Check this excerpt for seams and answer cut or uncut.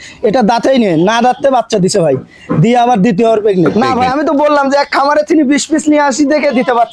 cut